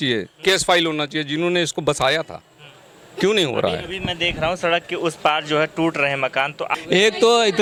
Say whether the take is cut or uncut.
uncut